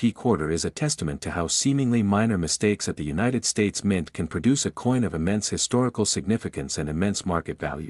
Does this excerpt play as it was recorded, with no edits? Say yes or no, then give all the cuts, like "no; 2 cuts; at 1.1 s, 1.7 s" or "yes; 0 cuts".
yes; 0 cuts